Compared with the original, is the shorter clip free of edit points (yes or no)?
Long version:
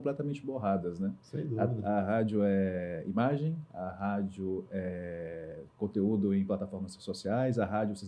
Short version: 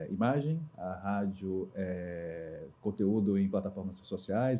yes